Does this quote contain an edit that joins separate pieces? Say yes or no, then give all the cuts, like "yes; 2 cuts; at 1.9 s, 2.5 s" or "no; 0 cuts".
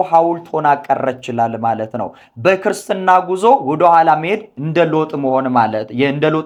no; 0 cuts